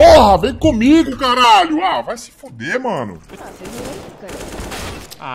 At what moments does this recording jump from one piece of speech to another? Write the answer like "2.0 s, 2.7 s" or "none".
3.2 s